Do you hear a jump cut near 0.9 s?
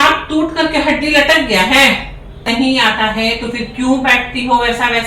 no; 1 cut; at 2.5 s

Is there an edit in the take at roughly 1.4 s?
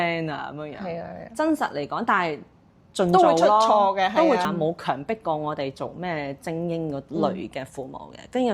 no; 1 cut; at 4.4 s

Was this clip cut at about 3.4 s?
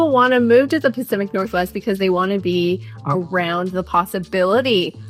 no; 0 cuts

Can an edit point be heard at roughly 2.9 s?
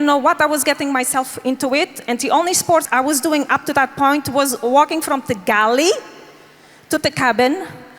yes; 1 cut; at 2.9 s

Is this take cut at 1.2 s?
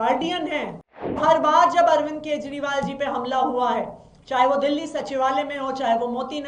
yes; 1 cut; at 1.2 s

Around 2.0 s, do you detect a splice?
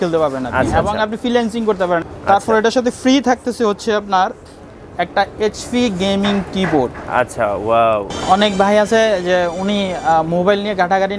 yes; 2 cuts; at 2.0 s, 8.1 s

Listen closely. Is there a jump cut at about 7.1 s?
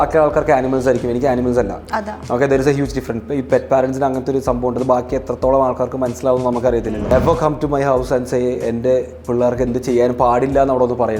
yes; 1 cut; at 7.1 s

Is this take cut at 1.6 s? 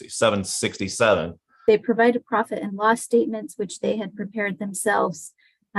yes; 1 cut; at 1.6 s

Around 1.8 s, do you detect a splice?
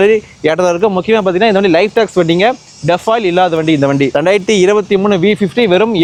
no; 0 cuts

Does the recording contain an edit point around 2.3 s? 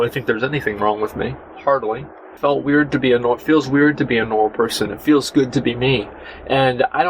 yes; 1 cut; at 2.3 s

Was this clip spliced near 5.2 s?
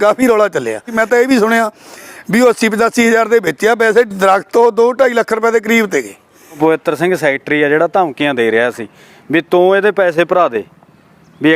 no; 2 cuts; at 1.0 s, 6.6 s

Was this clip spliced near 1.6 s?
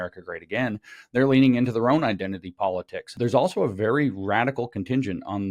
no; 1 cut; at 3.1 s

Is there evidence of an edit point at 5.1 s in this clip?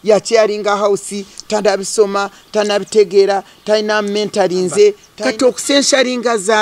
yes; 1 cut; at 5.1 s

